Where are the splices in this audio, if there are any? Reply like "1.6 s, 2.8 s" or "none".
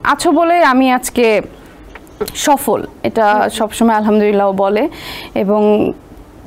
none